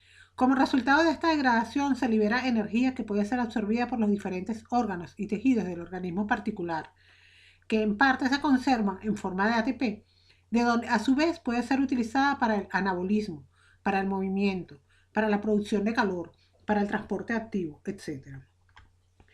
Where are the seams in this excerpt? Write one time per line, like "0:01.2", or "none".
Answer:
0:12.7